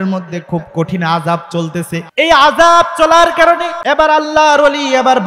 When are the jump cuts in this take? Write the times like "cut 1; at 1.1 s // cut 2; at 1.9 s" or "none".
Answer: cut 1; at 2.1 s // cut 2; at 3.7 s